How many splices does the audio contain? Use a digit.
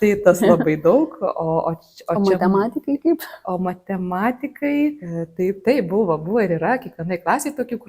1